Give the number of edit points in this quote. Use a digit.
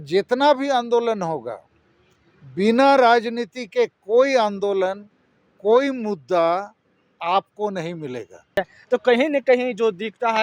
1